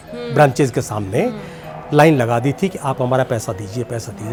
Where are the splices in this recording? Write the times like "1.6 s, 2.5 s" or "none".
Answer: none